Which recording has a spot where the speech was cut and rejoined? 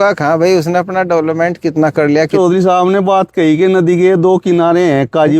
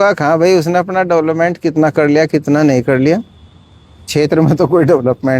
first; 1 cut; at 2.3 s

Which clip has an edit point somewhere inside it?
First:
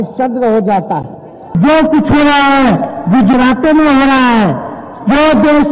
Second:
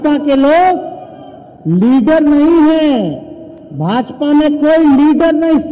first; 1 cut; at 1.6 s

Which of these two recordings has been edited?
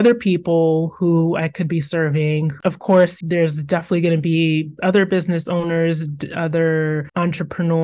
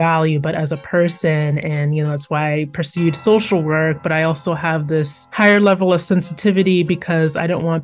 first; 1 cut; at 2.5 s

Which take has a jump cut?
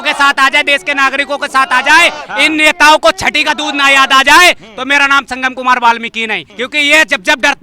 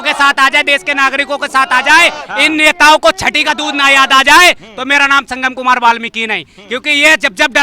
first; 1 cut; at 6.5 s

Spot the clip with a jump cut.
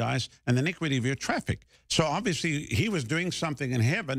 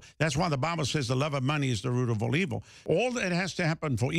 second; 1 cut; at 2.8 s

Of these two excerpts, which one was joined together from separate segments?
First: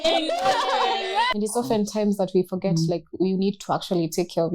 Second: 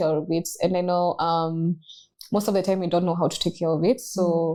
first; 1 cut; at 1.3 s

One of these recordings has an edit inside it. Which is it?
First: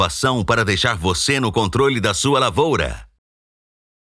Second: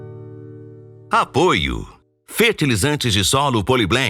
second; 1 cut; at 0.9 s

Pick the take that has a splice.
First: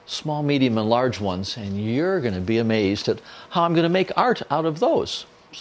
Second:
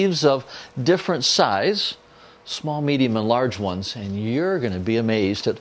second; 1 cut; at 1.0 s

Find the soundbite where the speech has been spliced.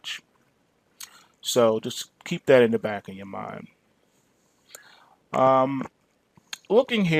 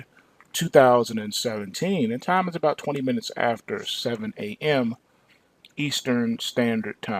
second; 1 cut; at 3.9 s

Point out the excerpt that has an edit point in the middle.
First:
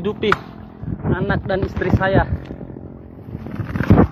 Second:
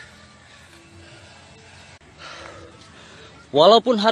second; 1 cut; at 2.0 s

